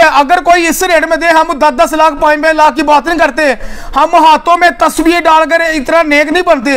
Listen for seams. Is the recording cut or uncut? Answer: uncut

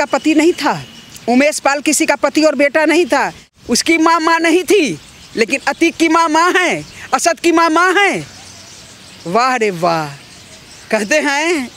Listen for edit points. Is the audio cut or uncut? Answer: cut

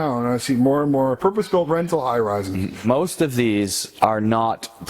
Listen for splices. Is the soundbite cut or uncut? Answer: cut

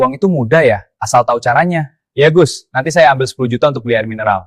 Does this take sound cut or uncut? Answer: uncut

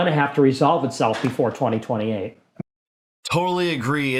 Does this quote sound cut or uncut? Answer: uncut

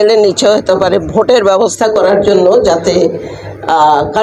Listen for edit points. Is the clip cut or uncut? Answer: uncut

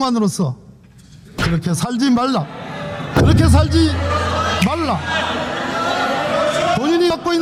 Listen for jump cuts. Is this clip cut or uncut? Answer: uncut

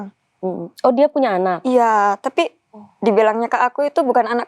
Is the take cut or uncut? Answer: uncut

